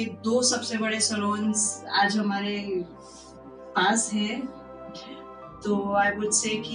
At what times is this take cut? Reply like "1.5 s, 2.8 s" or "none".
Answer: none